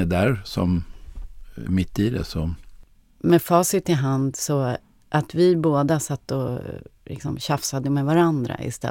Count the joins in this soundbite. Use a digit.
1